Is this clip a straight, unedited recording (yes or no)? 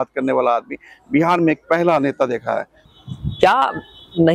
no